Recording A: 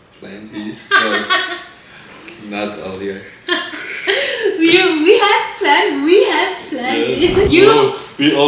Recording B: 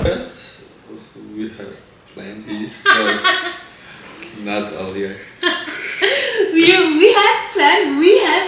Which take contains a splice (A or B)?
A